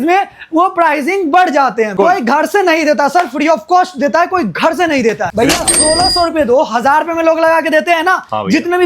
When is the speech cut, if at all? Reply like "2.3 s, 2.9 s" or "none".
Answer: 1.9 s, 5.3 s